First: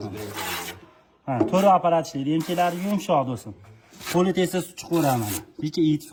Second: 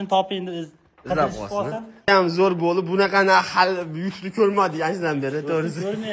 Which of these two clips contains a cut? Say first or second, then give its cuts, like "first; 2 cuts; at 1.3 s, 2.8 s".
second; 1 cut; at 2.1 s